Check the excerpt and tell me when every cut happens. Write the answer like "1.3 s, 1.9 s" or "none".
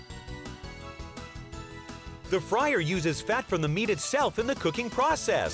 2.3 s